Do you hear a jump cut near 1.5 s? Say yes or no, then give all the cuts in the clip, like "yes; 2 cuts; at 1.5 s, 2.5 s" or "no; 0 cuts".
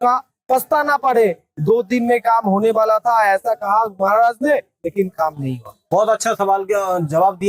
no; 0 cuts